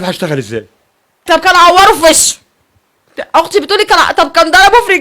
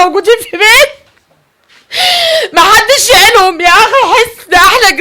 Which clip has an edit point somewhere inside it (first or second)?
first